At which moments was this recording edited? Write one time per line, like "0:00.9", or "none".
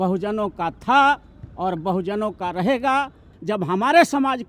0:03.3